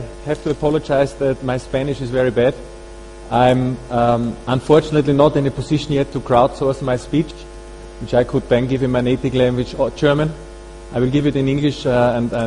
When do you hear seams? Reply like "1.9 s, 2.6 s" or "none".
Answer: 3.6 s